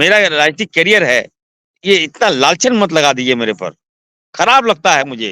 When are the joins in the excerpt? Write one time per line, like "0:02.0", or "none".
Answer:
none